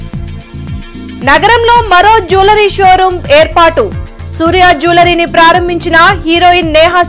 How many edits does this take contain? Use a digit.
1